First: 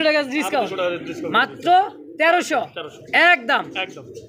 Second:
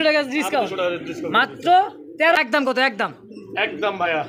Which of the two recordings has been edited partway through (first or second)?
second